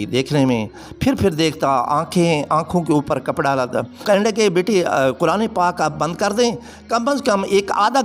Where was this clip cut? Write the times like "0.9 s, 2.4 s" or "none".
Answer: 4.0 s